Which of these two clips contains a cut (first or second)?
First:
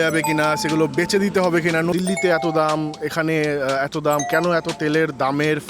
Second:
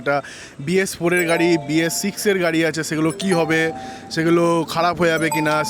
first